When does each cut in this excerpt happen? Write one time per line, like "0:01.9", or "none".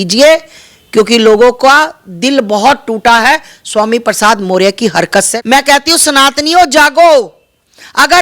0:05.3